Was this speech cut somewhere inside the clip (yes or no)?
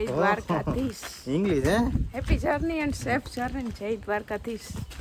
no